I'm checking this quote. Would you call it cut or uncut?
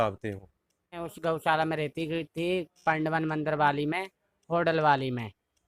cut